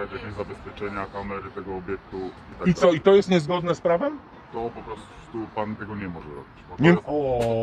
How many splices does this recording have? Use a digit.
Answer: 0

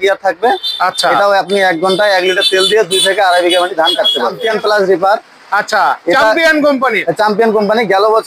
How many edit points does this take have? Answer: 1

